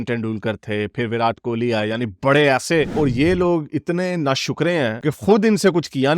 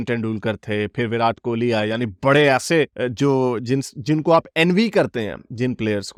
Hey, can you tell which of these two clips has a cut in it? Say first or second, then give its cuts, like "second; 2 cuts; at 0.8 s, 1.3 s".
first; 1 cut; at 2.9 s